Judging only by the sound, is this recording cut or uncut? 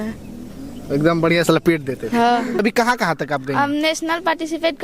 cut